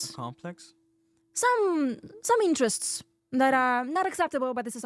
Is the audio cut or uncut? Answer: uncut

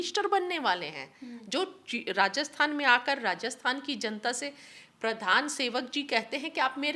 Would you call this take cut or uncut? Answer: uncut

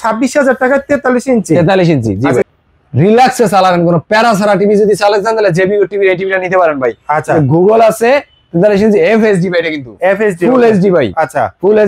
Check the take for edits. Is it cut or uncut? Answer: cut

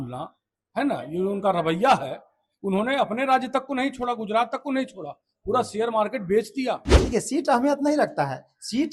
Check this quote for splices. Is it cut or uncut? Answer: cut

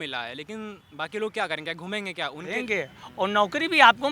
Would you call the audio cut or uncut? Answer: cut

